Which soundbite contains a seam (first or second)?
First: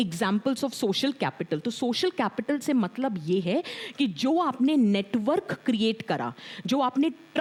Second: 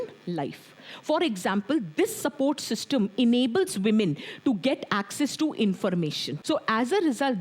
second